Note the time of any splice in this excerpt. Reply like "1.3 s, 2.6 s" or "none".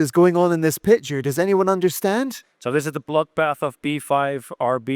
2.4 s